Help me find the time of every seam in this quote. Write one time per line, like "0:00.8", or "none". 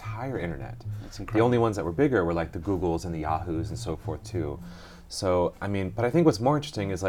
none